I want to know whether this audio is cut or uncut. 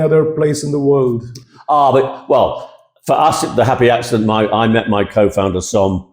uncut